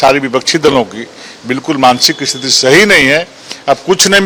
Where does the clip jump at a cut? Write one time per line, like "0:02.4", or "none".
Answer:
none